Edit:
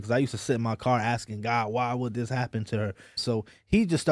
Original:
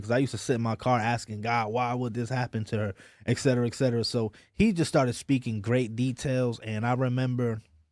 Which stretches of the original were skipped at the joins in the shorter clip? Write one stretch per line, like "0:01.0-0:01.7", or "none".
0:03.2-0:04.1